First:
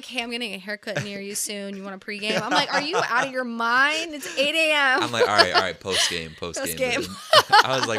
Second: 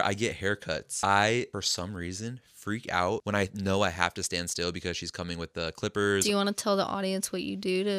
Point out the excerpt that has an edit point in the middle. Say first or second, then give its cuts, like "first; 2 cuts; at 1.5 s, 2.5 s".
second; 4 cuts; at 0.9 s, 1.5 s, 3.2 s, 6.2 s